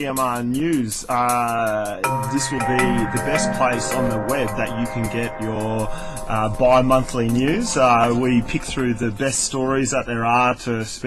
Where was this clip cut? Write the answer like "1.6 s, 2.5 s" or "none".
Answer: none

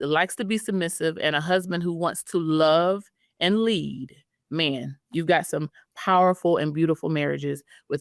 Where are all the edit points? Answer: none

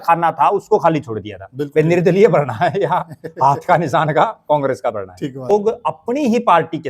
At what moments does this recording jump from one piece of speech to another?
5.5 s

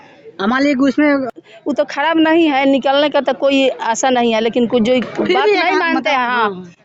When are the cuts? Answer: 1.3 s

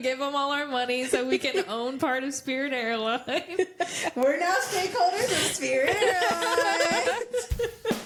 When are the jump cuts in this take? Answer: none

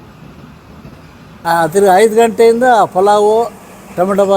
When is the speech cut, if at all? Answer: 1.5 s

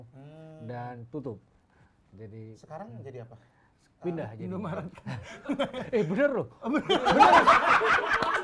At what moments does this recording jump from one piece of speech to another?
none

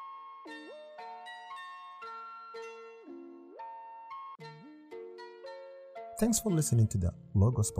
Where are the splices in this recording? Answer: 2.6 s, 4.4 s, 6.2 s

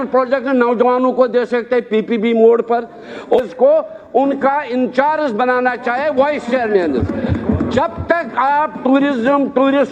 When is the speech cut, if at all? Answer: 3.4 s

